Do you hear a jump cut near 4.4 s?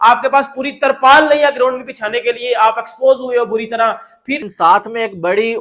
yes; 1 cut; at 4.4 s

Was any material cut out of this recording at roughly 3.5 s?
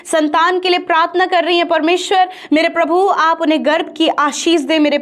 no; 0 cuts

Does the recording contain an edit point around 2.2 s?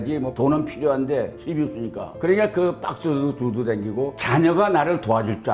no; 1 cut; at 4.2 s

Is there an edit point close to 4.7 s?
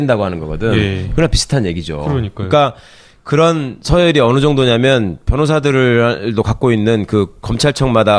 yes; 1 cut; at 4.7 s

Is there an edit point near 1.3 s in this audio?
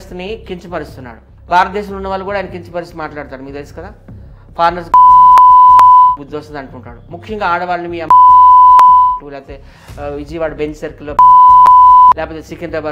yes; 1 cut; at 1.3 s

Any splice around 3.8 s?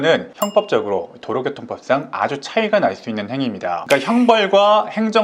yes; 1 cut; at 3.8 s

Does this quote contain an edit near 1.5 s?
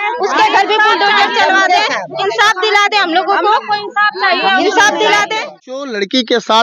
no; 1 cut; at 5.7 s

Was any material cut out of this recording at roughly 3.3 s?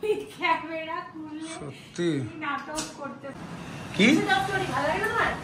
yes; 1 cut; at 3.3 s

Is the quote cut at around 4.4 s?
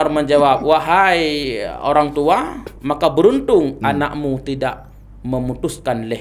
no; 0 cuts

